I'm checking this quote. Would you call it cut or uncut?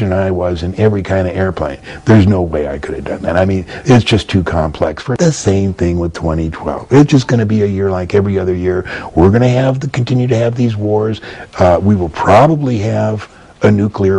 cut